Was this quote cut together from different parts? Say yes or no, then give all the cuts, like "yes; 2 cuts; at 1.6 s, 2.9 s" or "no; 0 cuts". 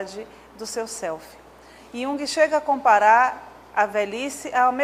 yes; 1 cut; at 2.2 s